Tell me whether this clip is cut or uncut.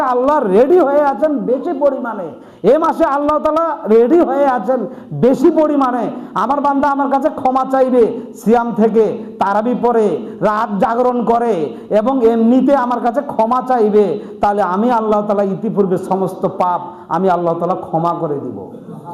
uncut